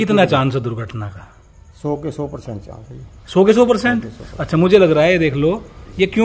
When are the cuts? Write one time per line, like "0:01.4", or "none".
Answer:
none